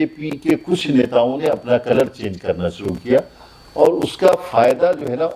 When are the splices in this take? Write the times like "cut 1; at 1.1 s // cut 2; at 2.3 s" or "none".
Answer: none